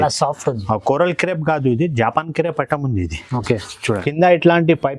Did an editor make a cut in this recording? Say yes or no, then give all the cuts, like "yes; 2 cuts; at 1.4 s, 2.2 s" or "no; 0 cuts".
yes; 1 cut; at 3.8 s